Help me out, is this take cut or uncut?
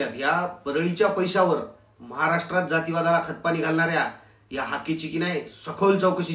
uncut